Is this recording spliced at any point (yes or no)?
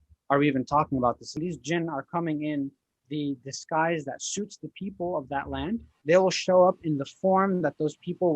yes